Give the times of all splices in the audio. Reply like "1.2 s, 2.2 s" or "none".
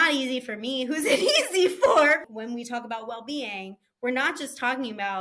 2.3 s